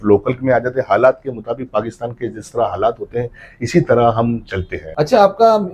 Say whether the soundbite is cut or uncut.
cut